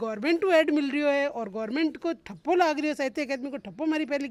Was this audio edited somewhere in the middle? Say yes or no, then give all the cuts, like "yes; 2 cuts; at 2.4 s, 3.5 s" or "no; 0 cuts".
no; 0 cuts